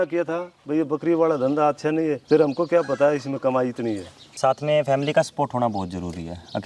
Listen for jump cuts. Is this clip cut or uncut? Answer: cut